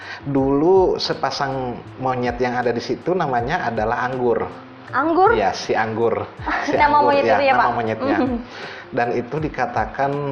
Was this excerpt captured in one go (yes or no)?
yes